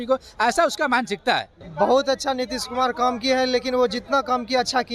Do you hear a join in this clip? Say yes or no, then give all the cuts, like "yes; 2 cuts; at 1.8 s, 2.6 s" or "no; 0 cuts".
yes; 1 cut; at 1.6 s